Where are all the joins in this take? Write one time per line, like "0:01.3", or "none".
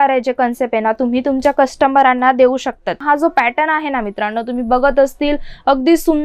0:03.0